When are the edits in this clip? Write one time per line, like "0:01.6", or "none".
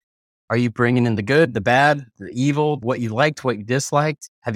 0:02.8